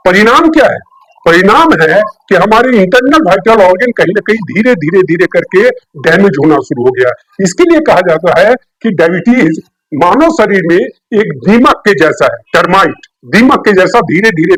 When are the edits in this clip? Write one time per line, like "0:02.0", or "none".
none